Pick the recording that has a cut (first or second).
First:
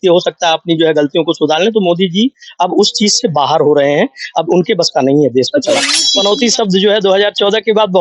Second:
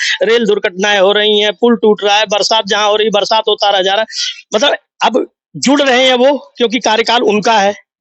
first